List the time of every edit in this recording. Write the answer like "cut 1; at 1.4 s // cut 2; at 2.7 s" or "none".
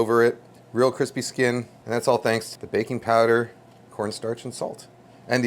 cut 1; at 1.7 s // cut 2; at 2.5 s